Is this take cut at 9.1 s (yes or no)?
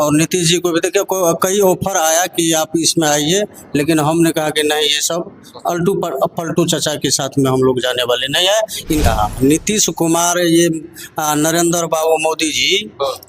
yes